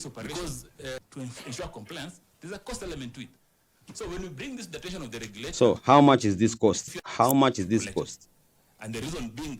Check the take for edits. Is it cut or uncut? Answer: cut